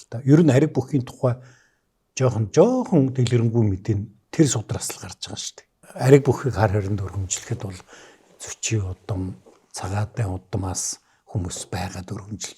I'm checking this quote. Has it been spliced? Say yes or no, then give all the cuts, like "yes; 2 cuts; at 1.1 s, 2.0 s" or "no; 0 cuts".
yes; 1 cut; at 5.8 s